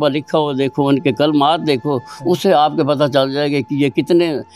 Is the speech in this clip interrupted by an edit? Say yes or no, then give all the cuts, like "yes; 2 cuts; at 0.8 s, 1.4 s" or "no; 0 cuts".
no; 0 cuts